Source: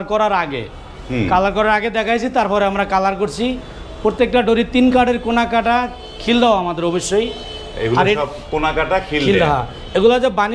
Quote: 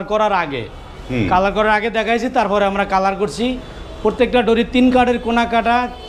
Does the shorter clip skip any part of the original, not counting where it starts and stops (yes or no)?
no